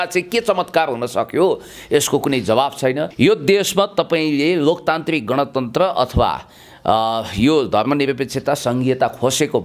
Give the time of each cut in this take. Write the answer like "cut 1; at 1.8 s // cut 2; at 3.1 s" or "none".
cut 1; at 3.1 s